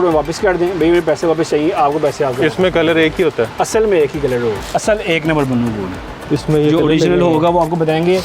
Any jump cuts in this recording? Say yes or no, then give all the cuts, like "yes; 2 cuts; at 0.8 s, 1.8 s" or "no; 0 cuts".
yes; 1 cut; at 4.6 s